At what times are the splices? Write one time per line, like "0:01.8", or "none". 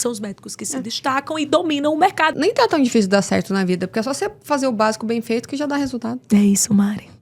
0:02.3